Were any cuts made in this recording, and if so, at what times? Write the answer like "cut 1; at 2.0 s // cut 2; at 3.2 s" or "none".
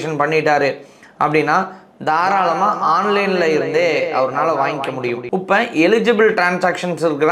cut 1; at 5.2 s